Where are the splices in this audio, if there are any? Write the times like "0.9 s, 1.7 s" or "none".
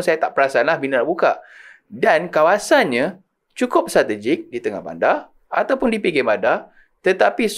none

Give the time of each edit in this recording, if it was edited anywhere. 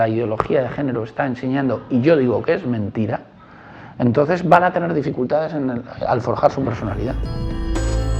7.3 s

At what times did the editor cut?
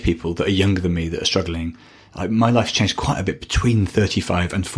none

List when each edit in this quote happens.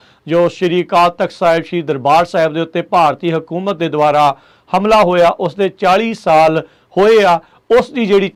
none

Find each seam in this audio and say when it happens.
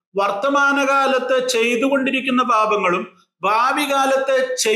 none

